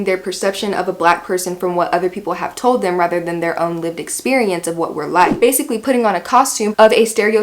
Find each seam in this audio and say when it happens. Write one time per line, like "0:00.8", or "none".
0:05.4